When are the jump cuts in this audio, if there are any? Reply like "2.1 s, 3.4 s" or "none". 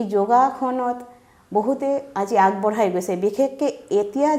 none